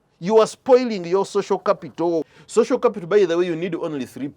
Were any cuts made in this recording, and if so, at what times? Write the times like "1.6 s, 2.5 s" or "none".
2.4 s